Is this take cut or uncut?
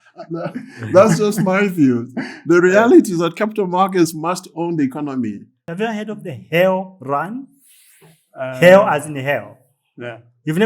cut